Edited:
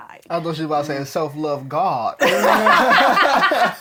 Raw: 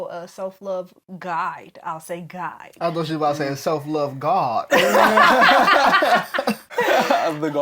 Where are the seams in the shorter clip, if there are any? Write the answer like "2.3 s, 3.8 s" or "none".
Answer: none